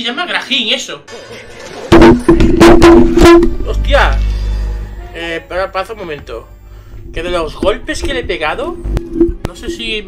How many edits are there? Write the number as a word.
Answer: one